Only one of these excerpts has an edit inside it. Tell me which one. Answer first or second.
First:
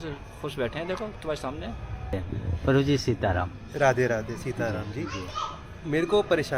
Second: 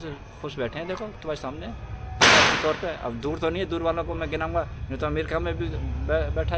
first